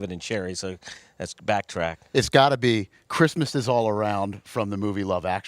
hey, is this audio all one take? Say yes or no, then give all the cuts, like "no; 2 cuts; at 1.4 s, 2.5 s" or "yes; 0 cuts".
no; 1 cut; at 2.0 s